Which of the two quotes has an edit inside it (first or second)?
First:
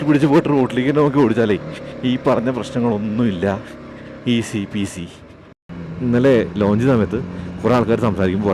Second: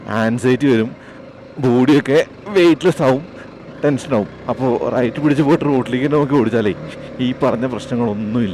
first